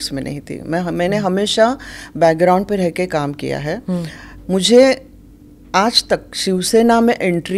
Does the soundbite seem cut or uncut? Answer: uncut